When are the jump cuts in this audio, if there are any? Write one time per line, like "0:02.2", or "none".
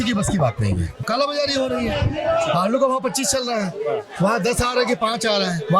0:00.9